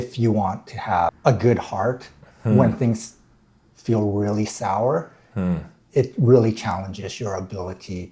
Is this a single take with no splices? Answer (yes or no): no